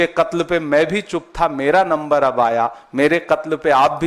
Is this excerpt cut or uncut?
uncut